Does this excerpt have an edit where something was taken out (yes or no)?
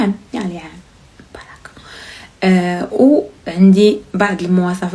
no